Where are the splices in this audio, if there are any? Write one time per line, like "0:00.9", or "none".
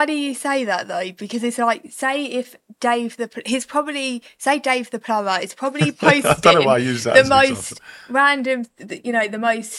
none